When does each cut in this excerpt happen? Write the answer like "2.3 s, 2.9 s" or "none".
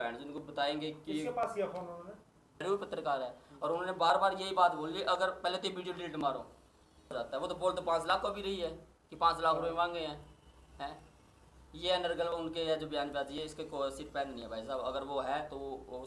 2.6 s, 7.1 s